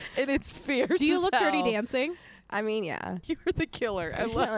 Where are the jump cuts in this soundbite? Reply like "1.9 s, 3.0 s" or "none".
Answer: 3.1 s